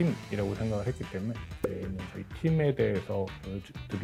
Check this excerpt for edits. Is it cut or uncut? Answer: uncut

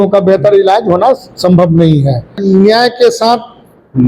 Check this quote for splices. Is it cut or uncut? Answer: cut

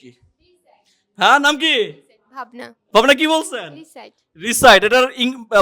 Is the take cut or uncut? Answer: cut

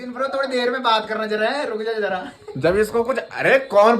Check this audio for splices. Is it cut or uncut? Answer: uncut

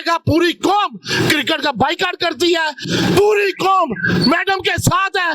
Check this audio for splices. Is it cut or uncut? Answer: cut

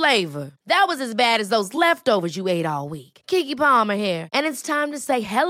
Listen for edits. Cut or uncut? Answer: uncut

